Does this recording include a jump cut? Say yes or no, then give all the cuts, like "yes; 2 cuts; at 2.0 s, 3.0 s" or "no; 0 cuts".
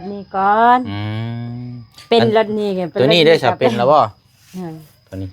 no; 0 cuts